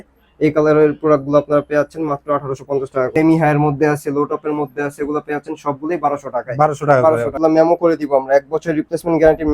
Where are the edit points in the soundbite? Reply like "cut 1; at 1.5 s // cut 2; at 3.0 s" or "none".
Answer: cut 1; at 3.1 s // cut 2; at 7.4 s